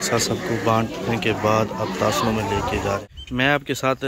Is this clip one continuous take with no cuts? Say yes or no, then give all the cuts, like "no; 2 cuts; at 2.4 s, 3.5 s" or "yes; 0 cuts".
no; 1 cut; at 3.1 s